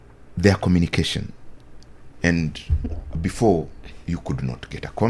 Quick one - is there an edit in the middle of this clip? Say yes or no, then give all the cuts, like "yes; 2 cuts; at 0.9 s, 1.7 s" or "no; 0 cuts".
no; 0 cuts